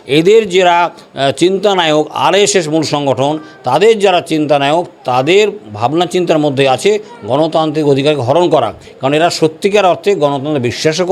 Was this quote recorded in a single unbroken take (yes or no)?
yes